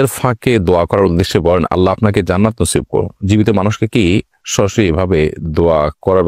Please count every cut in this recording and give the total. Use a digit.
0